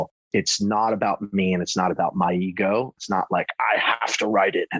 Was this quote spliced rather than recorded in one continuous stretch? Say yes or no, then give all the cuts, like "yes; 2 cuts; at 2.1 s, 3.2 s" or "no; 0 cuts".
yes; 1 cut; at 2.9 s